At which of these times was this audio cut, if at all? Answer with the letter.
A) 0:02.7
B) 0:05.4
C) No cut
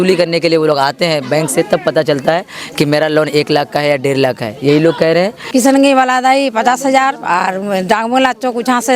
B